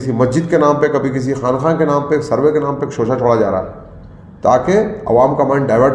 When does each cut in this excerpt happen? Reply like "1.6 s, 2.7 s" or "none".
none